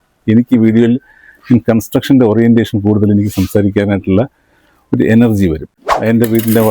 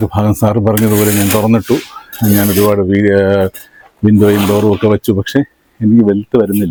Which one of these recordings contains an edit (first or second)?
first